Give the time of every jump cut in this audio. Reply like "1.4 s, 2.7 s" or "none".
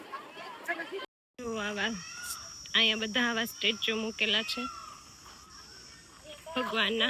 1.1 s